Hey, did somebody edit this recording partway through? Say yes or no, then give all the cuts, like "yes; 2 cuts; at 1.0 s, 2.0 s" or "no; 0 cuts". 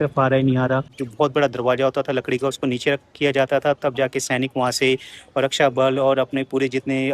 yes; 1 cut; at 1.0 s